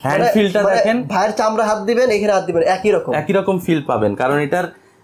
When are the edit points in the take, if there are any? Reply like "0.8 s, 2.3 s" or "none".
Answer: none

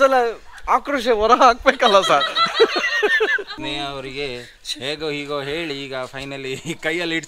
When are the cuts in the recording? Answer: 3.4 s

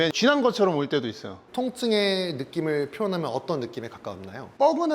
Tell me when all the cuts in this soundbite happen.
1.4 s

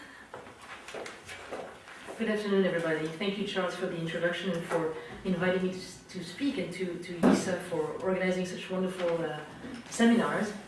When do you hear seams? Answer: none

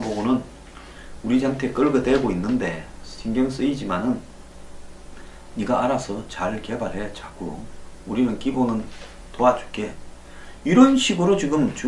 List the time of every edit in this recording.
none

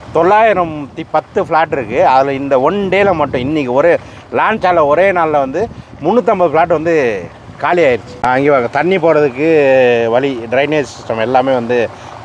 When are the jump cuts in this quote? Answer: 8.1 s

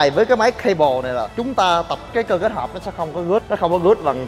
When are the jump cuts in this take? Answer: 2.0 s, 3.5 s

